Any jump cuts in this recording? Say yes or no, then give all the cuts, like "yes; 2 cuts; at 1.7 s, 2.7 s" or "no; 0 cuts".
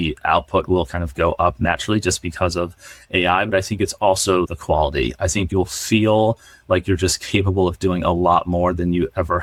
no; 0 cuts